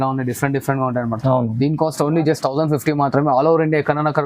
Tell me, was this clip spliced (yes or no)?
no